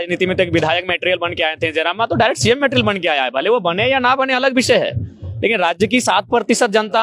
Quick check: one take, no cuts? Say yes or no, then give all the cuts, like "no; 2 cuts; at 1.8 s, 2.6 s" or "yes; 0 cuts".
yes; 0 cuts